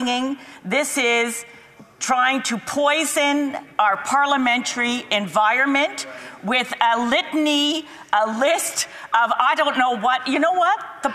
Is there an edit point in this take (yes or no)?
no